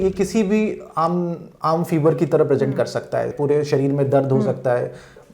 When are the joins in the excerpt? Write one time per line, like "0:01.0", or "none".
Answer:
0:03.3